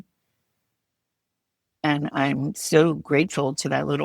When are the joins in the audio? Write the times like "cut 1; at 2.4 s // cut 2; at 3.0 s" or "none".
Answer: cut 1; at 2.5 s